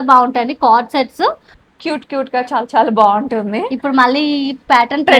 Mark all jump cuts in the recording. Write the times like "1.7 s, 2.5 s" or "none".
1.5 s